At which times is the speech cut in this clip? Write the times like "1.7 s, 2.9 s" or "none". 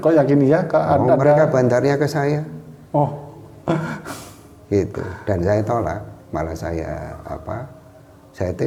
none